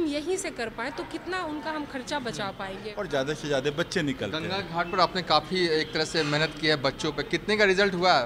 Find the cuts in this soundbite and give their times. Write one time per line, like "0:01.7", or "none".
0:02.9